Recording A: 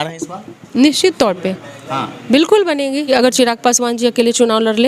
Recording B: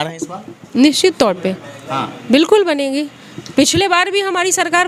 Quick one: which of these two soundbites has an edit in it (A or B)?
A